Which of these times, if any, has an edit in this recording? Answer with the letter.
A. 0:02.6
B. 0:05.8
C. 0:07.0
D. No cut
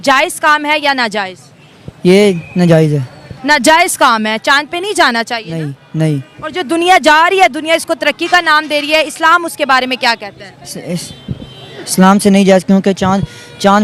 D